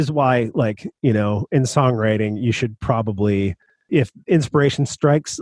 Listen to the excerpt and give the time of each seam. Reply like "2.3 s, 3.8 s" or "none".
3.9 s